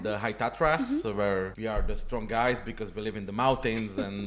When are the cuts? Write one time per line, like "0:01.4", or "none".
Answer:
0:01.5